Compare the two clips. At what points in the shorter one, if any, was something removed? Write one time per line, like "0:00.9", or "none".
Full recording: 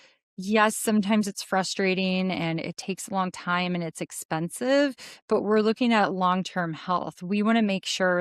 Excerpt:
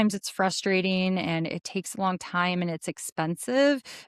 none